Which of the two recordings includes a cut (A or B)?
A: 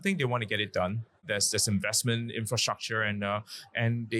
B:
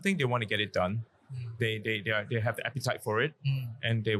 A